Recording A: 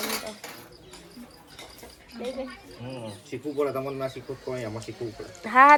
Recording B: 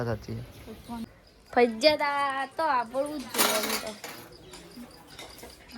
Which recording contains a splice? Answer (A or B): B